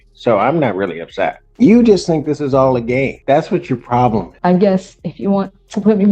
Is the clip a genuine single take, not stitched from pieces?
no; 3 cuts; at 1.4 s, 3.2 s, 4.3 s

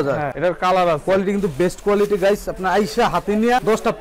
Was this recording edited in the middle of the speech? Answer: no; 0 cuts

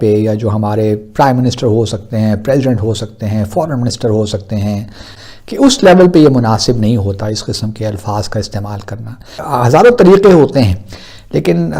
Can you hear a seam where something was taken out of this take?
yes; 2 cuts; at 5.0 s, 9.4 s

